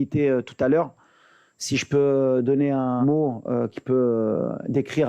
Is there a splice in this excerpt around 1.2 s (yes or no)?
no